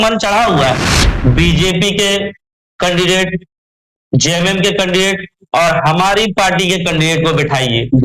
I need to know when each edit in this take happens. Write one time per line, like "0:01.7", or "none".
0:00.9